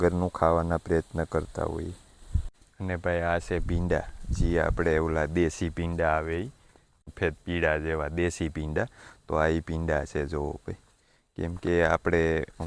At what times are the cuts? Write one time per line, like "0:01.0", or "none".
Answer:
none